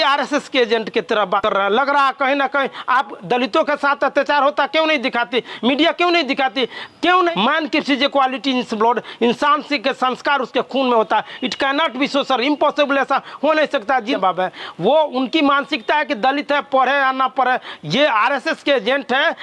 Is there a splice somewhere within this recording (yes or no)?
yes